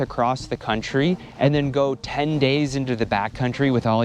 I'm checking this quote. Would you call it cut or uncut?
cut